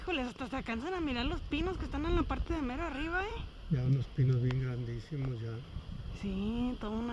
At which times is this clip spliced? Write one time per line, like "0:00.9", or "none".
none